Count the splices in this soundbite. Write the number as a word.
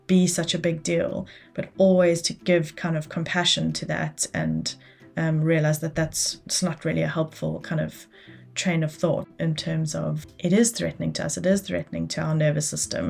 one